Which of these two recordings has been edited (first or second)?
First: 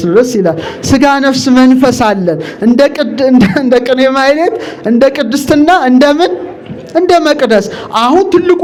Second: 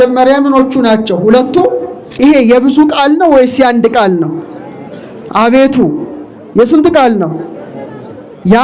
second